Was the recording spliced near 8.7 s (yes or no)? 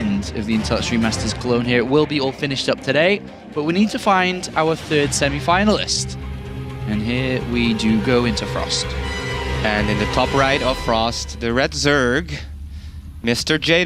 yes